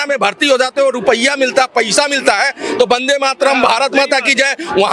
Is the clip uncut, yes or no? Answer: yes